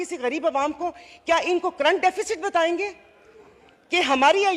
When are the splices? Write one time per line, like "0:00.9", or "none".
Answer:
none